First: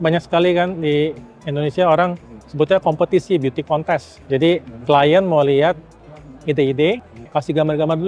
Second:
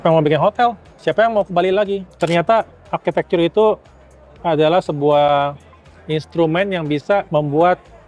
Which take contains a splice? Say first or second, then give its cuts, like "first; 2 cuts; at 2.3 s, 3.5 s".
second; 1 cut; at 2.2 s